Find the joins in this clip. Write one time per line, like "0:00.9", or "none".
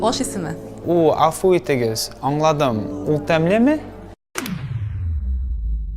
none